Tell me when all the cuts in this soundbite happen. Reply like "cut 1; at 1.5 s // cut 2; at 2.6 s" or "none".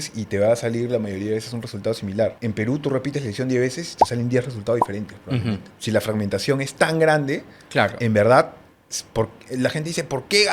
cut 1; at 2.4 s // cut 2; at 5.7 s